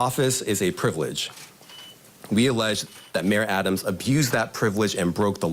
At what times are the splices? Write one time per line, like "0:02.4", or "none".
none